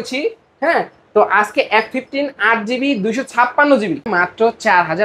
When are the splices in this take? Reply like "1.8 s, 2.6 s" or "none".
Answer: 4.1 s